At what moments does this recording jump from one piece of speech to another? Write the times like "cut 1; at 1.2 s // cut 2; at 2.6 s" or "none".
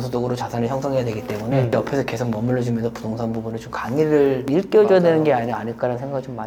none

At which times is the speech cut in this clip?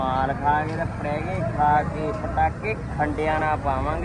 none

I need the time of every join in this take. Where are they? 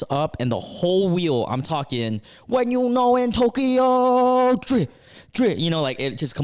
none

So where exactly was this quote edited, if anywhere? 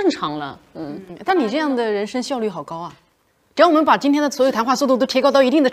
none

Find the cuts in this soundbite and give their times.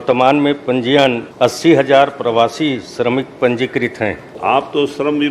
cut 1; at 1.3 s // cut 2; at 4.3 s

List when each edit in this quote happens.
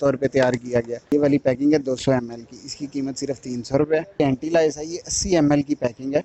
cut 1; at 1.0 s // cut 2; at 4.2 s

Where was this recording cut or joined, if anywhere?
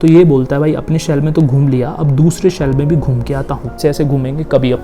cut 1; at 3.8 s

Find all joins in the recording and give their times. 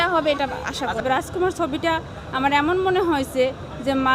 cut 1; at 1.0 s

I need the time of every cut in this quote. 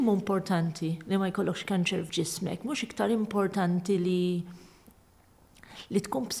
cut 1; at 2.1 s

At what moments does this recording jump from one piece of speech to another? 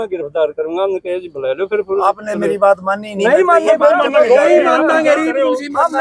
none

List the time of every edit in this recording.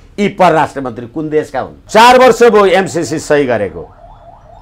cut 1; at 1.8 s

